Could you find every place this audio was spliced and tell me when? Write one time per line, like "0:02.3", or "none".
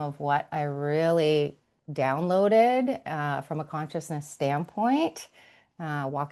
none